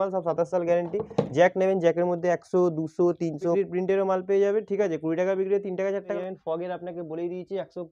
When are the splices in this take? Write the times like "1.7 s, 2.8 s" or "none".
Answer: 3.5 s, 6.1 s